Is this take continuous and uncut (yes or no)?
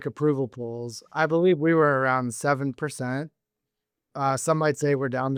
yes